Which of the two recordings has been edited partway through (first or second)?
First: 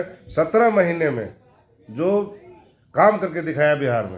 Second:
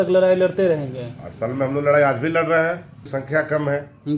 second